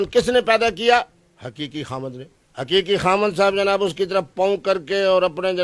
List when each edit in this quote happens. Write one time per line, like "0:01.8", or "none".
none